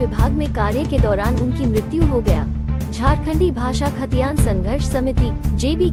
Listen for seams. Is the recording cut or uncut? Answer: uncut